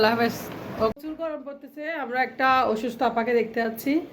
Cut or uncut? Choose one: cut